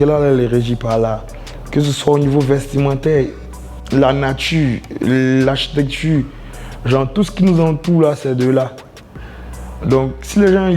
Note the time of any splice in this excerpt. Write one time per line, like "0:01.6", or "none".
none